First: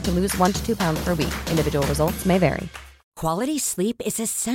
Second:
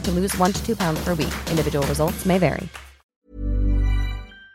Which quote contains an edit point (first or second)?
first